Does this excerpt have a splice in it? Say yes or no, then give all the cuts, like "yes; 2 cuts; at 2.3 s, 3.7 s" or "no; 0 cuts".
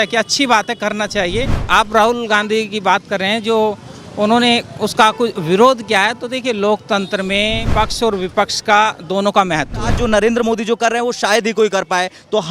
yes; 3 cuts; at 1.5 s, 7.6 s, 10.0 s